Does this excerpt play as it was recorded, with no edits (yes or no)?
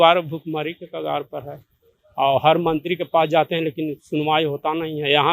yes